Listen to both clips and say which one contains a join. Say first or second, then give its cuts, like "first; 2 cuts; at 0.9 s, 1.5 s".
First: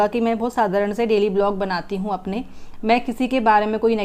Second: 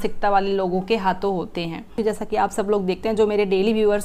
second; 1 cut; at 2.0 s